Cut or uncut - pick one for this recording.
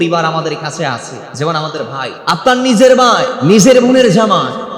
cut